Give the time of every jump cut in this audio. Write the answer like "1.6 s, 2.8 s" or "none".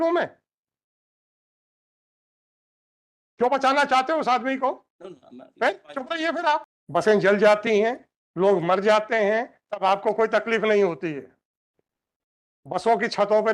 6.8 s